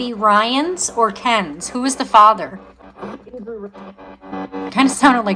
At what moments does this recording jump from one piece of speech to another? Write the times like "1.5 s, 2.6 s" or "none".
2.8 s, 4.3 s